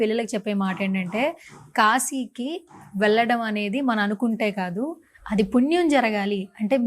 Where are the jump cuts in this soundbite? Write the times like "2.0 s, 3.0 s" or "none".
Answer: none